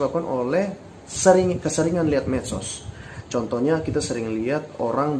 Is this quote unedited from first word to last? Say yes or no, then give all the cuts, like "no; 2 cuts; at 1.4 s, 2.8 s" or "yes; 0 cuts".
yes; 0 cuts